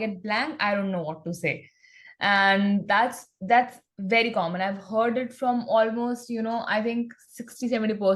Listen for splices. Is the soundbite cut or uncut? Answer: uncut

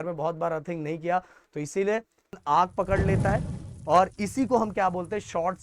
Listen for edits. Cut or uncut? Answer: cut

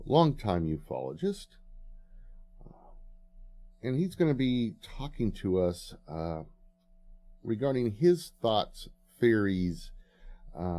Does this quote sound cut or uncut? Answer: cut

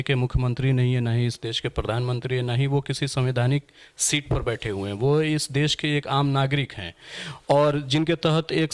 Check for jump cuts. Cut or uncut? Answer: uncut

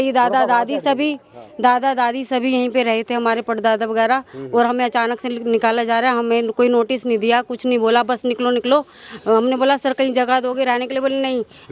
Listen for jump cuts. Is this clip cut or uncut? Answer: uncut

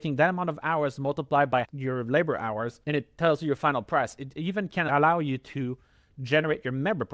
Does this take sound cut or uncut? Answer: cut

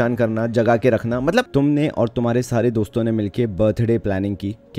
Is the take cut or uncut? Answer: cut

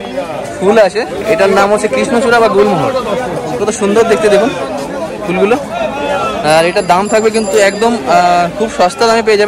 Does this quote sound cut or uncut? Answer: uncut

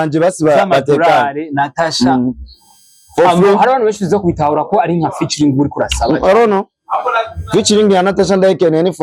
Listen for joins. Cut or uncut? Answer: uncut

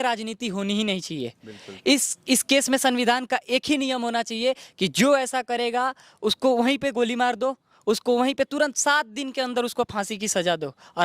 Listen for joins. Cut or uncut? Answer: uncut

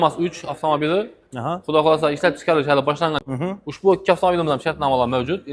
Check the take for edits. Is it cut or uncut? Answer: cut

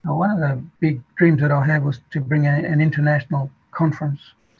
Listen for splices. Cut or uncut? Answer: uncut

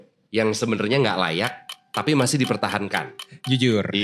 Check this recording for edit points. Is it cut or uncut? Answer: cut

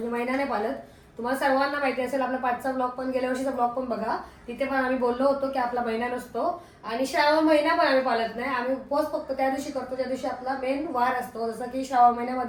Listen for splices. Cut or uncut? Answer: uncut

